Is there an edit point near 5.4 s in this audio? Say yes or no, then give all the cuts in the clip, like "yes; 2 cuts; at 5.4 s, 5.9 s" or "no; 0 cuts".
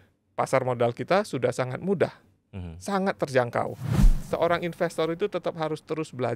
no; 1 cut; at 4.2 s